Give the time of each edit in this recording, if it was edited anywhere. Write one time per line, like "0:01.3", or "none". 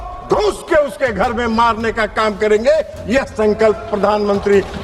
none